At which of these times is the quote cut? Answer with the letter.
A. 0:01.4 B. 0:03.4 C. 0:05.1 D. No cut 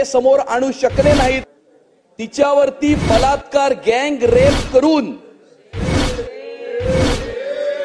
A